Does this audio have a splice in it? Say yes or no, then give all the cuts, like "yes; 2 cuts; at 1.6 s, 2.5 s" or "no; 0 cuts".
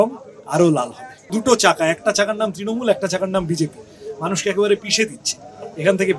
yes; 1 cut; at 1.3 s